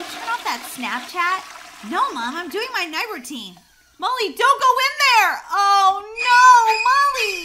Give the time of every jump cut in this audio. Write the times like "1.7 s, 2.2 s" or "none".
none